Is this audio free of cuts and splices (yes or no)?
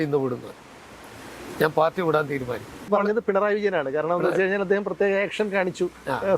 no